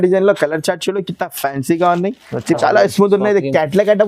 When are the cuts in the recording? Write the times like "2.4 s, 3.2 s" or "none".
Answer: 2.6 s